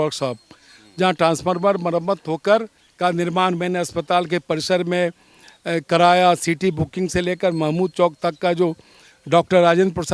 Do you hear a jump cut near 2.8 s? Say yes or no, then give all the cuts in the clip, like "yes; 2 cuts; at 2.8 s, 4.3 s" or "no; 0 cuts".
yes; 1 cut; at 2.8 s